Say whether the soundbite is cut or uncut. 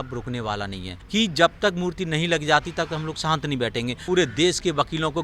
cut